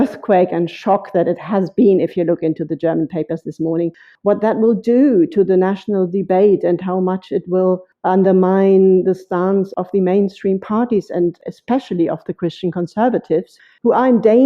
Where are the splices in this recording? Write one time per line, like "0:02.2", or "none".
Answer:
0:04.1
0:07.9
0:09.7
0:13.5